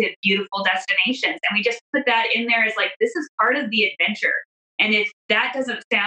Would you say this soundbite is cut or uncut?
cut